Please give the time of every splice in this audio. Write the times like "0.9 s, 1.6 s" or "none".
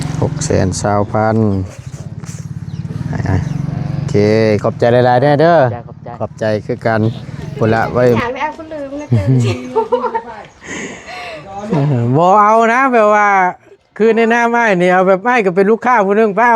8.2 s

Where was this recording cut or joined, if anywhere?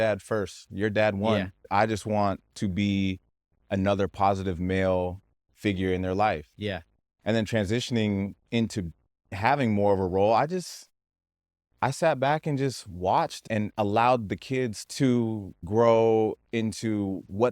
1.7 s, 9.3 s, 14.8 s

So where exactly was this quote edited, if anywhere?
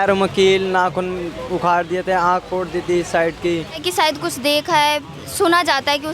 3.8 s

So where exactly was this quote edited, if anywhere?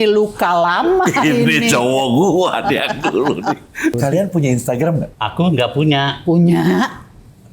4.0 s, 5.2 s

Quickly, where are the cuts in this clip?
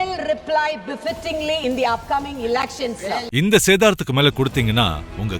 3.3 s

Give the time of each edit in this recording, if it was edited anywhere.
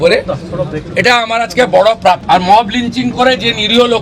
2.2 s

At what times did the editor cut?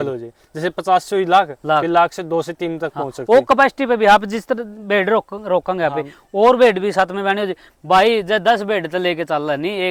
none

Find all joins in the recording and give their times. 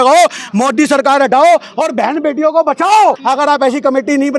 3.2 s

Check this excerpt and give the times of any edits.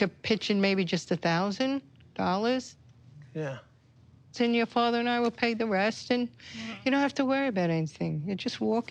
none

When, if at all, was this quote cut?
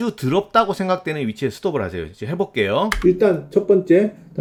none

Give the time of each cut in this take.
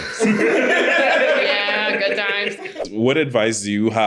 2.8 s

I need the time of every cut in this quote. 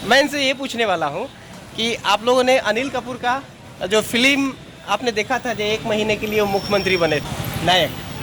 7.3 s

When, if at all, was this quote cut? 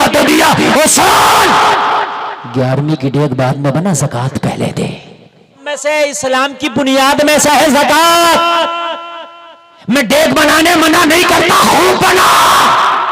5.5 s

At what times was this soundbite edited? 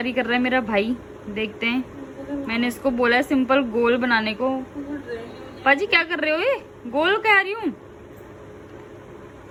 none

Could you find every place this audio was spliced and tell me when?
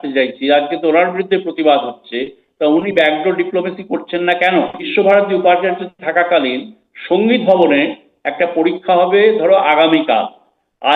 4.8 s

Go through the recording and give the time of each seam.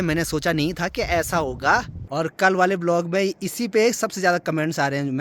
2.1 s

